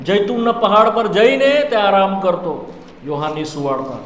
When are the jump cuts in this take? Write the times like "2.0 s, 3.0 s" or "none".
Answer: none